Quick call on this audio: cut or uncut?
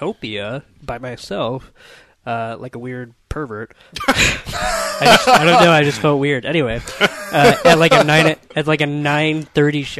uncut